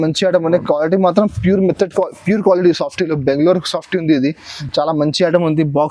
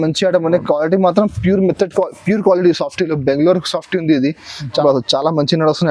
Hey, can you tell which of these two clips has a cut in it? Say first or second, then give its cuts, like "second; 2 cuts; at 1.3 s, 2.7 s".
second; 1 cut; at 4.7 s